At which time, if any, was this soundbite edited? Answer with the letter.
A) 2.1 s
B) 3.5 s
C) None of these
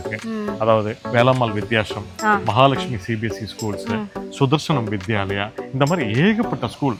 C